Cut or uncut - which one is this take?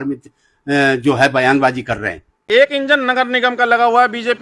cut